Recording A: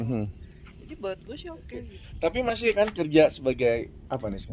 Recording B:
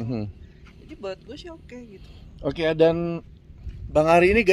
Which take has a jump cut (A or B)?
A